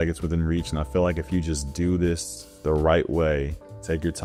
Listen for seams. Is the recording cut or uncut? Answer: uncut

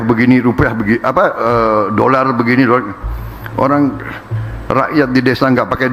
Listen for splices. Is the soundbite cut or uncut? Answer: uncut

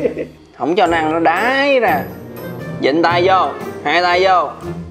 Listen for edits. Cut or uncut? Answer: cut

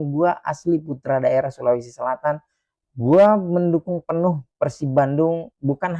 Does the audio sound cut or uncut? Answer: uncut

